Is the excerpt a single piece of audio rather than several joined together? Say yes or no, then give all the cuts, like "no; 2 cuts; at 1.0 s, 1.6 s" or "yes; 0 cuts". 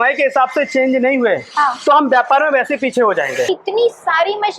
no; 1 cut; at 3.5 s